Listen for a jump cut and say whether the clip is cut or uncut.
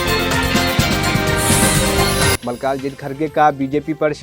uncut